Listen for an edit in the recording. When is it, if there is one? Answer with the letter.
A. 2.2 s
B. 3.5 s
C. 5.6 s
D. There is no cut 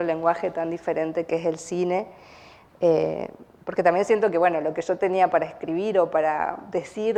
D